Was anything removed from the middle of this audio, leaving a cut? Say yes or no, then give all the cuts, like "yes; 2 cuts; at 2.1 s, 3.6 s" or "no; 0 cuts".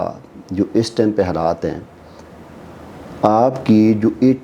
no; 0 cuts